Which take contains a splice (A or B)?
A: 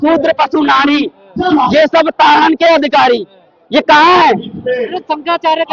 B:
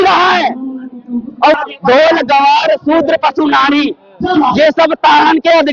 B